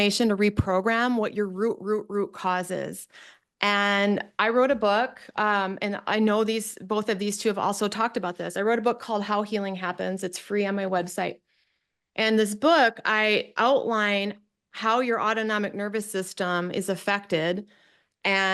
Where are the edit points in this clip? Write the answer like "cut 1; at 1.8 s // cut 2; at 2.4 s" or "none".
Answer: none